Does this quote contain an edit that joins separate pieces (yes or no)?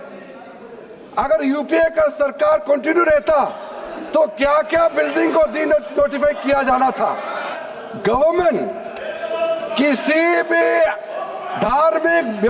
yes